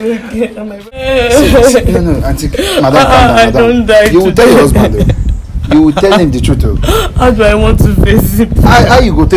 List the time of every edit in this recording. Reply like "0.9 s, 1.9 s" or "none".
1.0 s